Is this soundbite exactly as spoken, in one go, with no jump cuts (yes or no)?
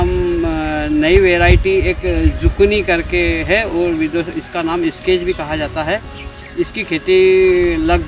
yes